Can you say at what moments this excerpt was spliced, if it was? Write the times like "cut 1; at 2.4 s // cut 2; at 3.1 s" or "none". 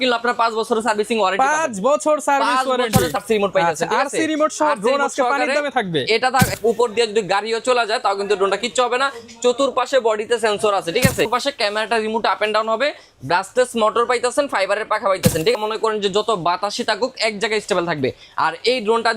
cut 1; at 3.1 s // cut 2; at 6.5 s // cut 3; at 11.3 s // cut 4; at 15.5 s